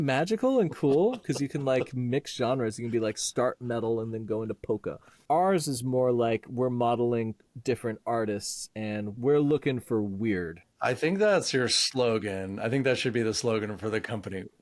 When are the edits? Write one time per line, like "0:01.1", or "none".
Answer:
0:05.1
0:07.5
0:09.1
0:10.8